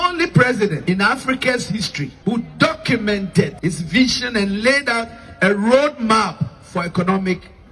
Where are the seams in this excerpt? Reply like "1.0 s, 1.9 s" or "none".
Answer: 0.8 s, 2.0 s, 3.5 s

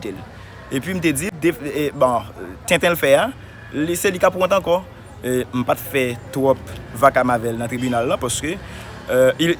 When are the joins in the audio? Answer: 1.3 s

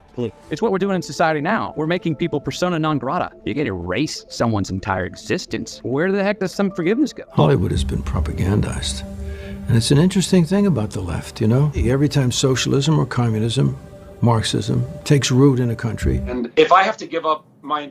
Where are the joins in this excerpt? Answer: 7.2 s, 11.8 s, 16.4 s

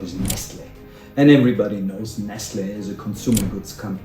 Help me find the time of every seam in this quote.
none

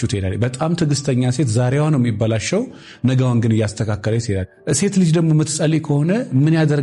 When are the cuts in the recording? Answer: 4.4 s

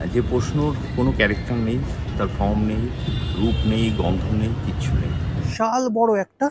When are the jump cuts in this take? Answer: 5.5 s

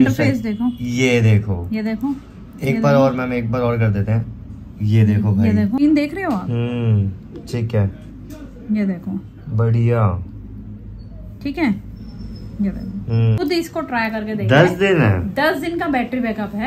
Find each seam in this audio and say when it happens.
5.8 s, 13.4 s

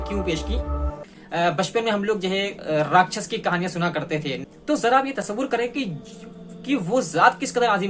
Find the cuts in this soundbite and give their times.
1.1 s, 4.4 s

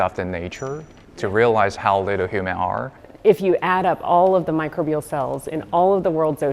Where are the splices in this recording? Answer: 1.8 s, 3.0 s

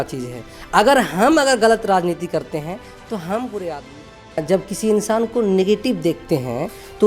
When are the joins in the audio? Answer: 4.4 s

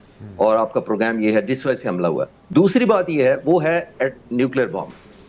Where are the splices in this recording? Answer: 2.4 s

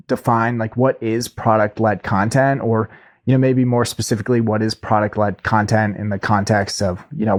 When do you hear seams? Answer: none

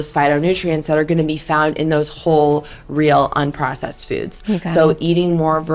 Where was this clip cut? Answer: none

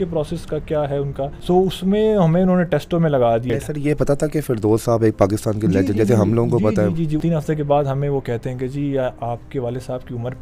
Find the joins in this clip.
1.4 s, 3.5 s, 7.2 s

